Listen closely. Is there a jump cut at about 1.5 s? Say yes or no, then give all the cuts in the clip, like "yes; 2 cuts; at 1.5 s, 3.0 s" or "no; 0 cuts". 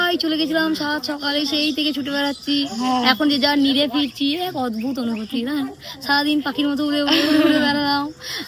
no; 0 cuts